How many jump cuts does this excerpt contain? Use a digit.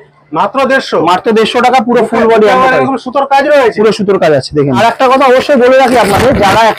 1